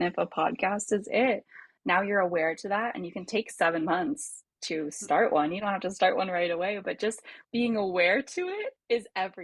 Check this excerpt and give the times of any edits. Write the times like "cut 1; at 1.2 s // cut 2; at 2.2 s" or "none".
none